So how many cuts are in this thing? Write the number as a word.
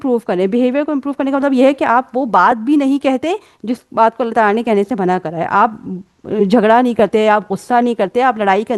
zero